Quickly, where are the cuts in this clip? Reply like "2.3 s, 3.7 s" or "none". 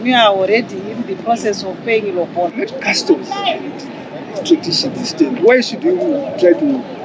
2.6 s